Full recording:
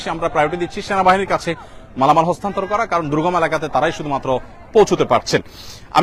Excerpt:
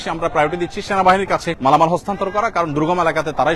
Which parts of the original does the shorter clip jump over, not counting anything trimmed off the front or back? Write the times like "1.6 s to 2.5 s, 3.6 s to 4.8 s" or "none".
1.5 s to 1.9 s